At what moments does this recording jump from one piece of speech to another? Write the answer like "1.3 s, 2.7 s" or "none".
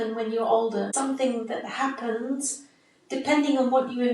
0.9 s